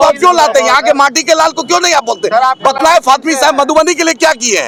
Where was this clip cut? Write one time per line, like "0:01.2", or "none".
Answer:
none